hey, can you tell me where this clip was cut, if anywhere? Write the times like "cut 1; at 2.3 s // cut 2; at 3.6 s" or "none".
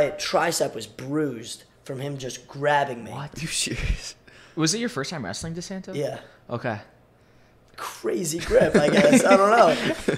none